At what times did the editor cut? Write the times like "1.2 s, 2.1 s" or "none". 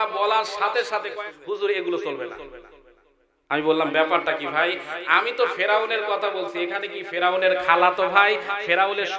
1.1 s